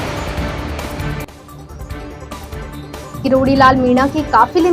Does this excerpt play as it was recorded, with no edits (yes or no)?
no